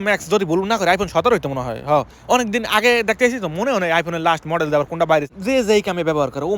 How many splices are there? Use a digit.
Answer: 1